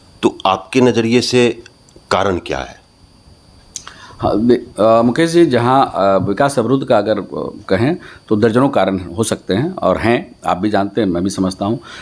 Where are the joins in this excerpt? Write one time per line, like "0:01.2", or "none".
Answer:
none